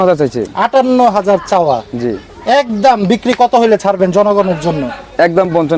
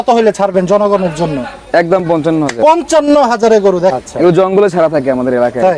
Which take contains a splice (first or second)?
second